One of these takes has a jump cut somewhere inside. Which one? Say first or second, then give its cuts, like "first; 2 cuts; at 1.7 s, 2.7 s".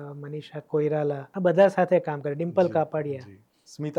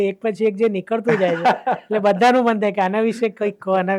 first; 1 cut; at 1.3 s